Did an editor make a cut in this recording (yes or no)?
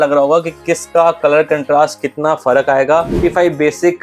yes